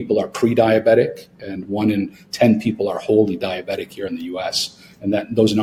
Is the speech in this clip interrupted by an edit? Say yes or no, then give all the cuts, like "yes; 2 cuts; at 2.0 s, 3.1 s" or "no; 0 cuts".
no; 0 cuts